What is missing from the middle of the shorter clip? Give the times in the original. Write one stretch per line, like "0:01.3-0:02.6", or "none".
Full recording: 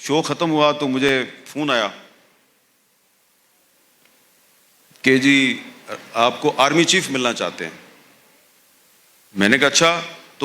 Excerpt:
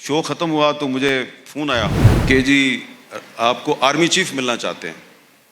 0:02.1-0:04.8